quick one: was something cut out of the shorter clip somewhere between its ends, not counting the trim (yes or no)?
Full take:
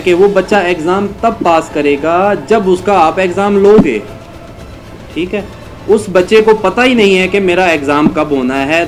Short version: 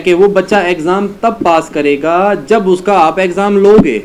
no